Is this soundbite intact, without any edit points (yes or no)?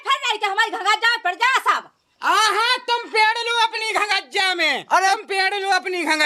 yes